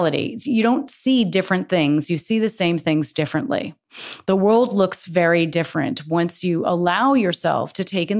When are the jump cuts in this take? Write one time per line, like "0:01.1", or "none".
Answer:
none